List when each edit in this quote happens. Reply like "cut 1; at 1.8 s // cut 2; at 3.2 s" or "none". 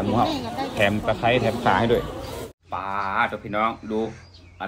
cut 1; at 2.7 s